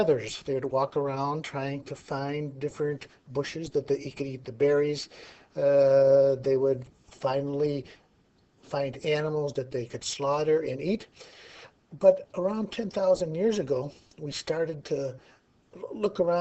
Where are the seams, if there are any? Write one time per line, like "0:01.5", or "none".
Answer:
0:05.9